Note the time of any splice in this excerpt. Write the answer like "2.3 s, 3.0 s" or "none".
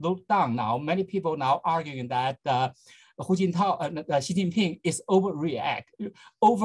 none